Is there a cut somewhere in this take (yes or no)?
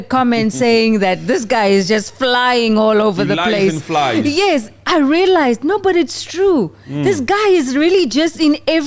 no